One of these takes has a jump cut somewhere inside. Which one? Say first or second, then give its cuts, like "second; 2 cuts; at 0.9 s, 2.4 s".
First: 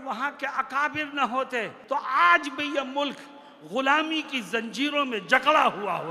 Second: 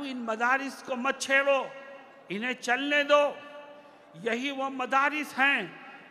first; 1 cut; at 1.8 s